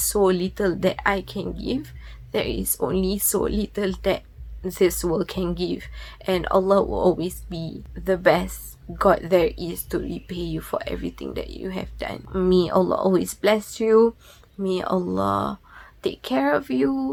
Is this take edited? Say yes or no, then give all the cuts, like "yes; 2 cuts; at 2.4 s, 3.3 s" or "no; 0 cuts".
no; 0 cuts